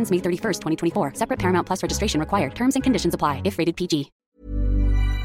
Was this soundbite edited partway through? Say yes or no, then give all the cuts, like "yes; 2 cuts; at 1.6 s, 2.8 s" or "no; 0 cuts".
yes; 1 cut; at 4.2 s